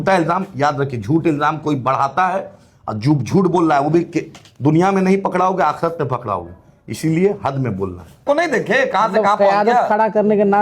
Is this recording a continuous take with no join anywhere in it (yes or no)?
no